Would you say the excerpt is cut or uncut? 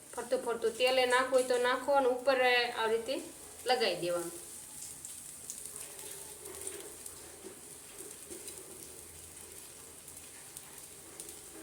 uncut